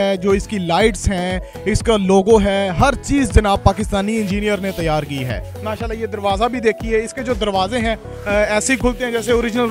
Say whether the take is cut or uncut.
uncut